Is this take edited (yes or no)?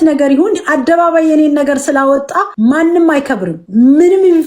yes